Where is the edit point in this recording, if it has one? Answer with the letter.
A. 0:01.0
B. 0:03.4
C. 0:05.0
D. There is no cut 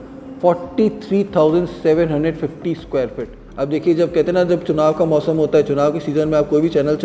B